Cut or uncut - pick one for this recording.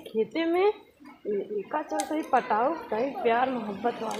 uncut